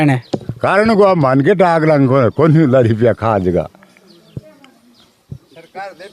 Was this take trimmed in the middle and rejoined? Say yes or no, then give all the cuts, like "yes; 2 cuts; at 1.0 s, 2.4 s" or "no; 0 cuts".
no; 0 cuts